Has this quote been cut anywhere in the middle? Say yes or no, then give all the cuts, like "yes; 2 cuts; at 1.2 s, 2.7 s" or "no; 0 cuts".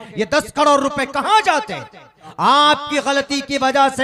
yes; 1 cut; at 2.2 s